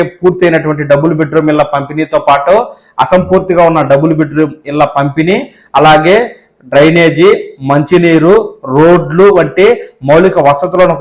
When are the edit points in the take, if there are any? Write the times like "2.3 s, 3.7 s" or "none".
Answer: none

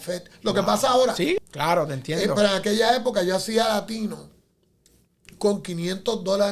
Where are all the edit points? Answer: 1.4 s

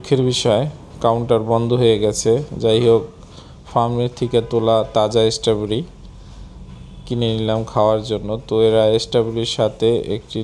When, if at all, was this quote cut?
none

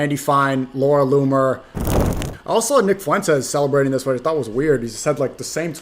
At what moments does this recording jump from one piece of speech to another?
2.1 s

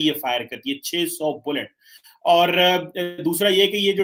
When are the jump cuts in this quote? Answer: none

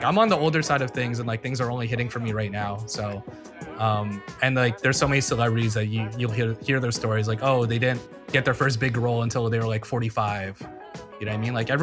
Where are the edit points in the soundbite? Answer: none

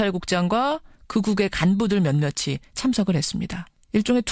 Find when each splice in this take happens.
2.3 s

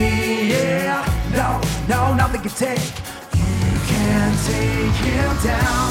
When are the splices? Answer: none

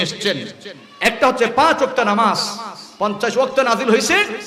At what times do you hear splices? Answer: none

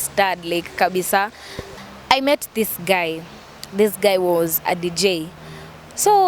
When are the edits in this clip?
1.7 s

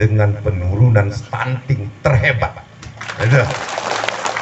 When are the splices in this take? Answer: none

